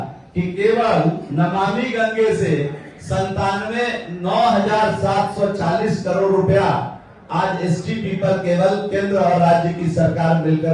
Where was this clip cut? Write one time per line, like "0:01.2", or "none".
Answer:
none